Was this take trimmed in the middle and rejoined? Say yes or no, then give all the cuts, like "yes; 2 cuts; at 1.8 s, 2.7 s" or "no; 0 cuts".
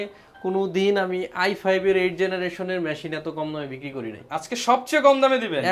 no; 0 cuts